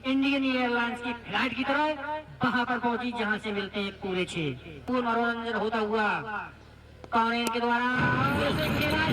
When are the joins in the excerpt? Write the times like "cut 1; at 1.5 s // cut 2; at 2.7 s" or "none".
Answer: cut 1; at 4.8 s